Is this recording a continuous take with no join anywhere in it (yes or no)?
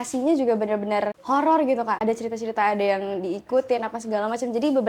no